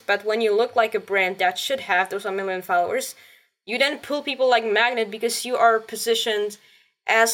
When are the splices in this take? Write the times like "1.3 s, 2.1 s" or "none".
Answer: none